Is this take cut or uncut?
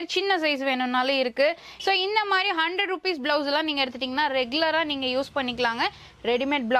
cut